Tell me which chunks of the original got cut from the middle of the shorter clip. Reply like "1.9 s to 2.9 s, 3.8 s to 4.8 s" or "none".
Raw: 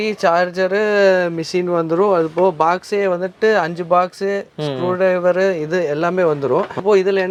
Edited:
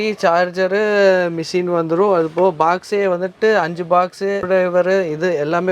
4.4 s to 4.9 s